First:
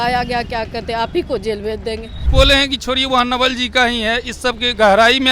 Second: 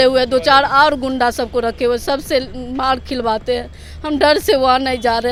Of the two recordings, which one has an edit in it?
first; 1 cut; at 2.1 s

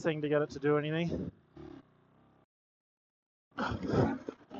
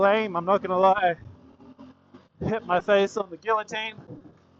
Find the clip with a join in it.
second; 1 cut; at 1.8 s

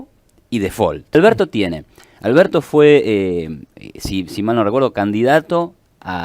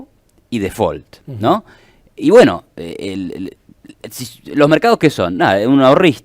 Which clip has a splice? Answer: first; 1 cut; at 1.2 s

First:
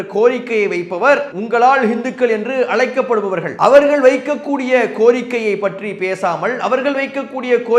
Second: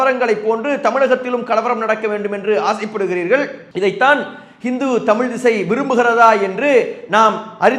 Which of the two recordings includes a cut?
first; 2 cuts; at 1.3 s, 3.5 s

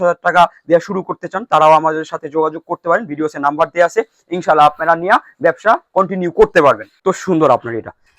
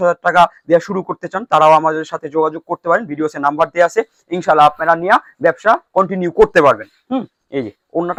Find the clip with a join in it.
first; 1 cut; at 7.0 s

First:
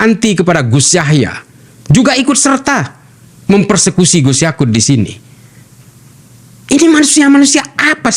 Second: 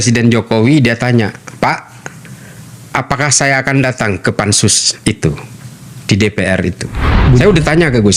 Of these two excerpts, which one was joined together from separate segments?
second; 1 cut; at 7.1 s

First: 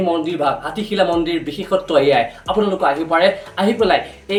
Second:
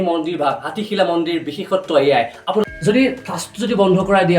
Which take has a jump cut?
second; 1 cut; at 2.6 s

